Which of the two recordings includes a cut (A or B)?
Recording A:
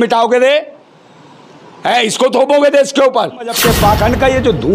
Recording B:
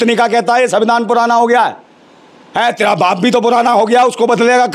A